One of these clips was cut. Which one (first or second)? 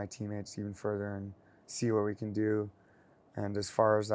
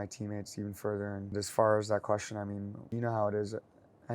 second